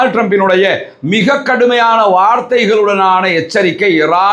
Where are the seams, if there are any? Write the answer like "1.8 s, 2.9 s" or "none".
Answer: none